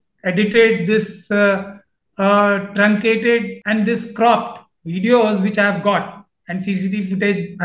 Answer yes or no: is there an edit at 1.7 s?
no